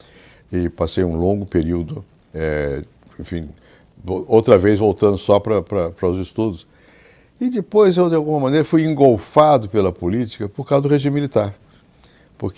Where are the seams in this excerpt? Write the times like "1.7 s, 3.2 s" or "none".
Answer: 6.8 s